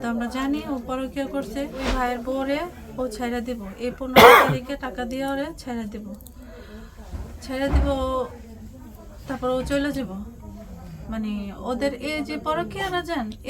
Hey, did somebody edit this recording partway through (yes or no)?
yes